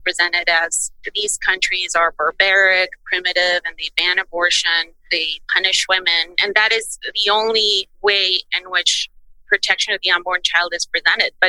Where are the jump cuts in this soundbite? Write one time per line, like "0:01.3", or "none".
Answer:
none